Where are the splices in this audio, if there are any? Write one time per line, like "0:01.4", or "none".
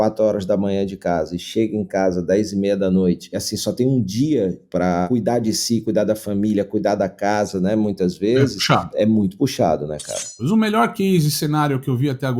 0:03.4
0:05.0
0:10.4